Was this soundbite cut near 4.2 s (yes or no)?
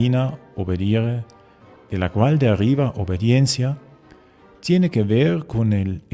no